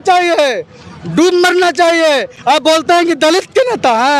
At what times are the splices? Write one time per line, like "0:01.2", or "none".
none